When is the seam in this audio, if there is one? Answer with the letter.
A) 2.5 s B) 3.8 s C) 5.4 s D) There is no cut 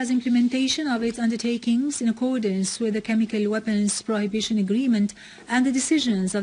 A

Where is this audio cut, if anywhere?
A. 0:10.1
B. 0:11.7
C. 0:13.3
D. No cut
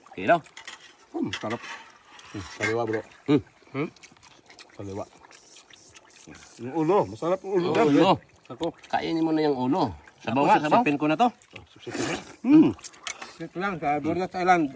C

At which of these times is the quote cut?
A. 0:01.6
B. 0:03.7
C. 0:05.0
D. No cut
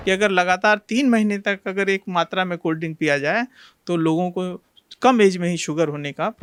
D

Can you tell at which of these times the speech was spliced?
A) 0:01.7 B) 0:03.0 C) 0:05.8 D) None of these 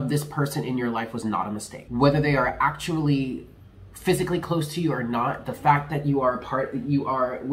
A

